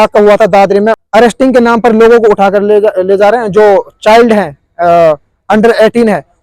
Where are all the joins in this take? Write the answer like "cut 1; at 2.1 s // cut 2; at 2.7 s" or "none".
cut 1; at 1.0 s